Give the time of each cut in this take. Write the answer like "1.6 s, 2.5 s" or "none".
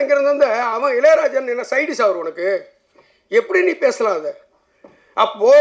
none